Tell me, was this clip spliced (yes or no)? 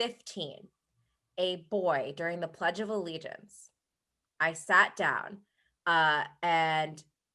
no